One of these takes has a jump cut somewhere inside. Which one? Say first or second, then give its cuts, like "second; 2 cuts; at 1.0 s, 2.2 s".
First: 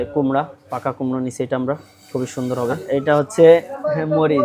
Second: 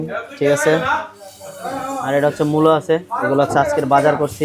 first; 1 cut; at 2.8 s